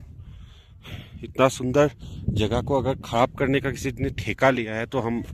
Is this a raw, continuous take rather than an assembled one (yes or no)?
yes